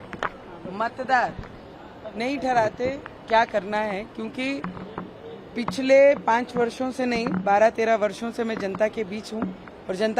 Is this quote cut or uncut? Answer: uncut